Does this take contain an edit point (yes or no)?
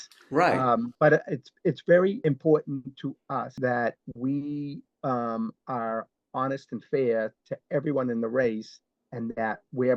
yes